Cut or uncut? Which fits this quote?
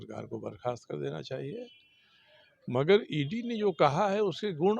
uncut